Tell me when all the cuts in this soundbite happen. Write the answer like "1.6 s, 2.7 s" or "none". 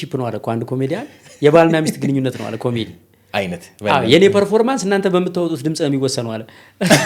none